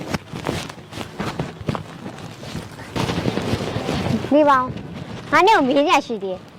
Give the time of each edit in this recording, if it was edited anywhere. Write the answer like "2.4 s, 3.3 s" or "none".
none